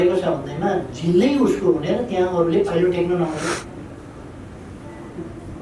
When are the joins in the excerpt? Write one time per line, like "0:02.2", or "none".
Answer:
none